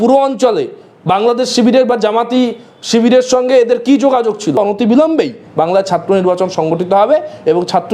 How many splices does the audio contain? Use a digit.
1